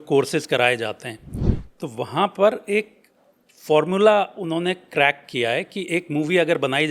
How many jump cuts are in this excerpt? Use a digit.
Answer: 0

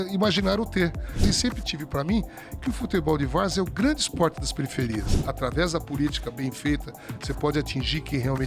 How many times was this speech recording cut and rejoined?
2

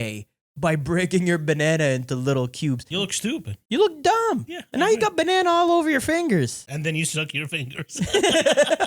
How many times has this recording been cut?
2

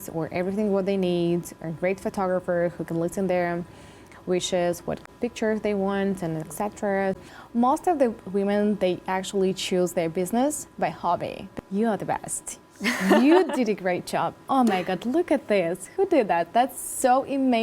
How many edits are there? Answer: 3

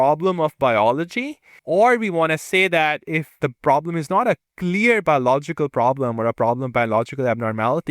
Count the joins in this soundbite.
2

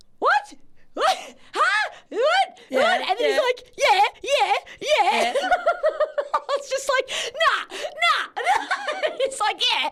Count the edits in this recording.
0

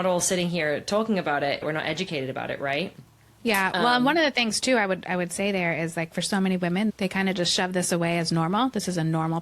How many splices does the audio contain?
2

